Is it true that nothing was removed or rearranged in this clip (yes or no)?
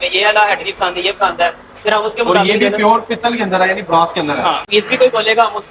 no